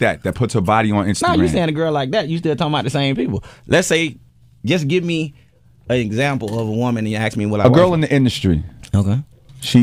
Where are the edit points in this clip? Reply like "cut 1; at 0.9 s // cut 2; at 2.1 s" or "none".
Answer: cut 1; at 3.7 s